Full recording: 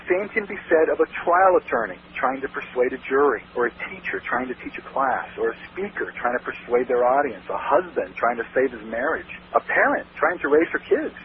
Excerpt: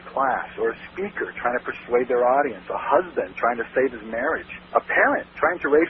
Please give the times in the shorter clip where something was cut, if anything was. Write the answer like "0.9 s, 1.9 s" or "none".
none